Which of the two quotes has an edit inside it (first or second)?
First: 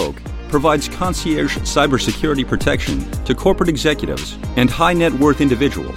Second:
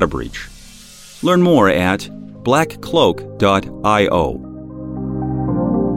second